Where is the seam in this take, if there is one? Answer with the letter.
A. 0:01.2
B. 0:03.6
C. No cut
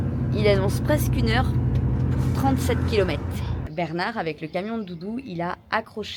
B